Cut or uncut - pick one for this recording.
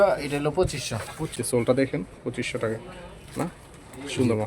cut